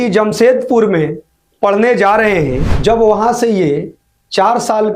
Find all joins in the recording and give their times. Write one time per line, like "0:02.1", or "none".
0:02.7

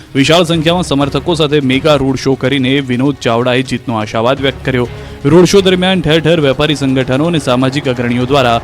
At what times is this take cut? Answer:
0:02.2

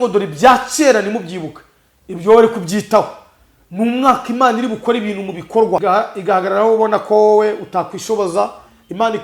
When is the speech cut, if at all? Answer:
0:05.8

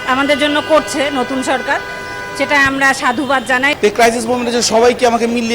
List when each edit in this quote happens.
0:03.7

